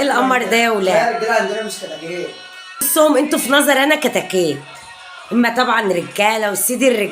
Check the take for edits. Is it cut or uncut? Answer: cut